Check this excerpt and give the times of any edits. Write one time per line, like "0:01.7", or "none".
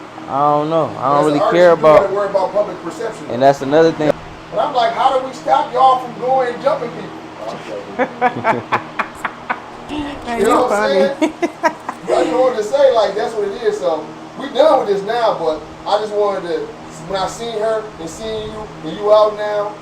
0:04.1